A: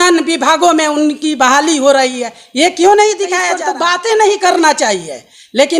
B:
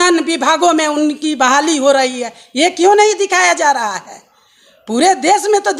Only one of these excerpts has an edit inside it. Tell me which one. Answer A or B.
A